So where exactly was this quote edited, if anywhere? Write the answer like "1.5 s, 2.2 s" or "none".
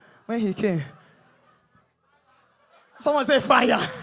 none